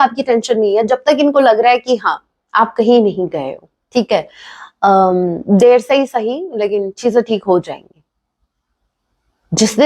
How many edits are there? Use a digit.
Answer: 0